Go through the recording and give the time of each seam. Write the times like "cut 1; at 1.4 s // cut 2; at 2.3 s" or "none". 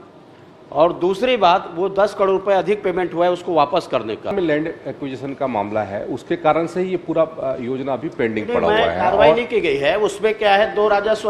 cut 1; at 4.3 s